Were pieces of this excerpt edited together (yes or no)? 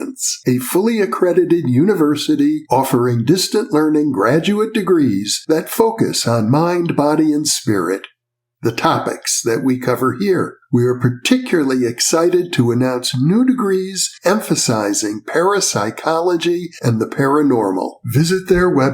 no